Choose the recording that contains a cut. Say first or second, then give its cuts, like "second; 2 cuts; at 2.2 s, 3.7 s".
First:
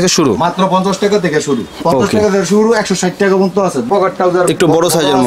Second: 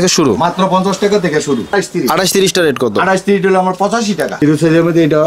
second; 2 cuts; at 1.7 s, 4.3 s